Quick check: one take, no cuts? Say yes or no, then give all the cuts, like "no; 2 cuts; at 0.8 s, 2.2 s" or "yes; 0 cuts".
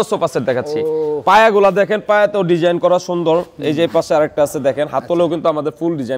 yes; 0 cuts